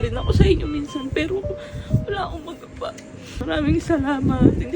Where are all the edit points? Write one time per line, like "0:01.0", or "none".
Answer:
0:03.4